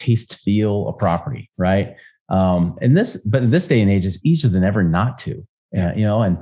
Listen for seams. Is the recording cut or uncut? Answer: uncut